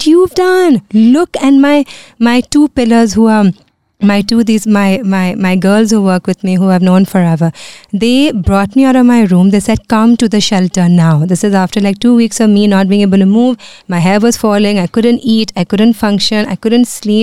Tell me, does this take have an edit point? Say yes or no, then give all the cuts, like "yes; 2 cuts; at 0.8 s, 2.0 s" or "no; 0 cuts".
no; 0 cuts